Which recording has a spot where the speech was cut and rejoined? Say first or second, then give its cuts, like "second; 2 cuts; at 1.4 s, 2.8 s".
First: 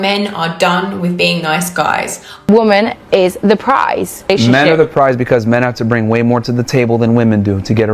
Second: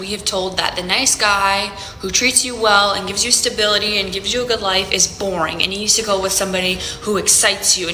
first; 1 cut; at 2.3 s